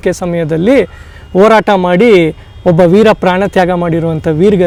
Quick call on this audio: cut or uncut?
uncut